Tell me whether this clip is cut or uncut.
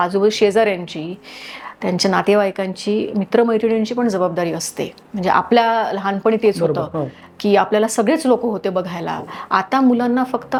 uncut